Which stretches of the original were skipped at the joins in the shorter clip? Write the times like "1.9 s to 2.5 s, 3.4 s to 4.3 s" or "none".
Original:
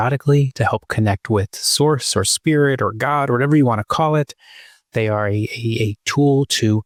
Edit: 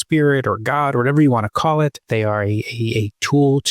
4.3 s to 4.8 s

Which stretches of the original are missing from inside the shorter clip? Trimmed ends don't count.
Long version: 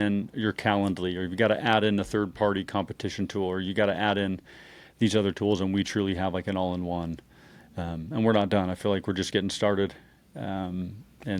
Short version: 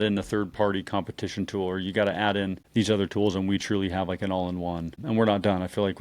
4.4 s to 4.9 s, 7.2 s to 8.0 s

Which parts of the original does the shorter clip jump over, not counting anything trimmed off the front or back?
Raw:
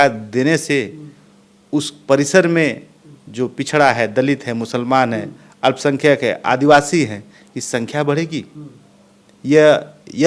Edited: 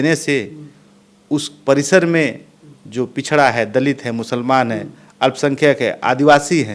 none

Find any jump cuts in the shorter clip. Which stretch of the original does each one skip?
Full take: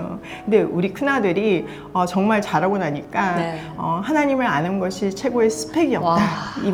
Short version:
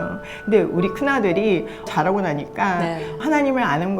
1.9 s to 2.4 s, 3.8 s to 4.0 s

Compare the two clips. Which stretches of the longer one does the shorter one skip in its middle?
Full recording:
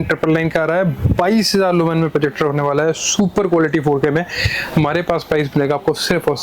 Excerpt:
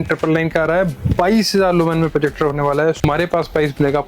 3.1 s to 4.8 s

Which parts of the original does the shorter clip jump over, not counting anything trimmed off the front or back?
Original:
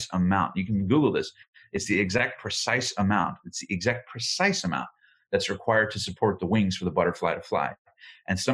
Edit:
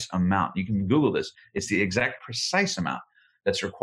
1.4 s to 1.6 s, 2.5 s to 4.1 s

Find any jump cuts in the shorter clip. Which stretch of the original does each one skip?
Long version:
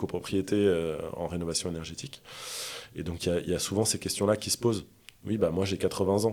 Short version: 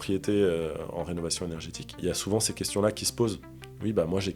2.2 s to 3.4 s

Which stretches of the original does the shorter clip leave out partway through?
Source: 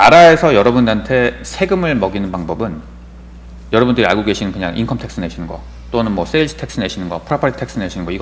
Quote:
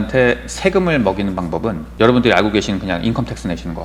2.8 s to 3.6 s

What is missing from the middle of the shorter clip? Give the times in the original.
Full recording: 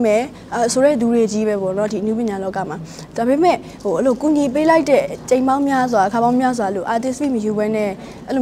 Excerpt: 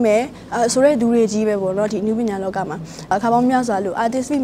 3.1 s to 6.0 s

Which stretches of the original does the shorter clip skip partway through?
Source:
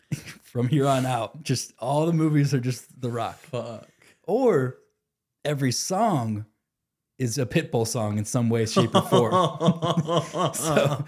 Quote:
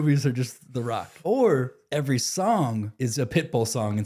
3.4 s to 4.1 s, 4.8 s to 5.3 s, 6.4 s to 7.1 s

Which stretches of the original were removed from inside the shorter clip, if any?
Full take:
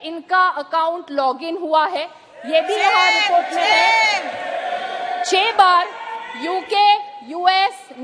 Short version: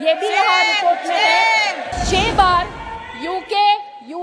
4.4 s to 5.1 s

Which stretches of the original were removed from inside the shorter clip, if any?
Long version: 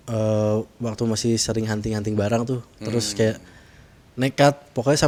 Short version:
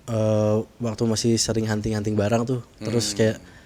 none

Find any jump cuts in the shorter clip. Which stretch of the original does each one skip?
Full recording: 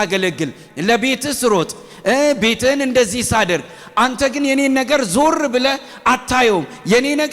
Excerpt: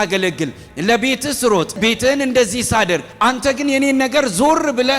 1.8 s to 2.4 s, 3.7 s to 3.8 s

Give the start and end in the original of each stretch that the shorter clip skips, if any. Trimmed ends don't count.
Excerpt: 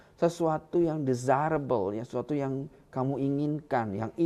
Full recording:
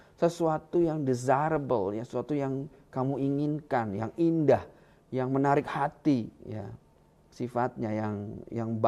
none

